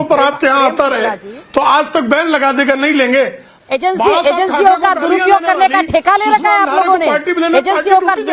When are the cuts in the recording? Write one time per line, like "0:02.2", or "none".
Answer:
0:03.5